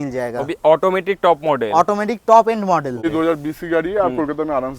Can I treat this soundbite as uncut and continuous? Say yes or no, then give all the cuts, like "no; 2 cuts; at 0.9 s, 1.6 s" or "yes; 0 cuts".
no; 1 cut; at 3.0 s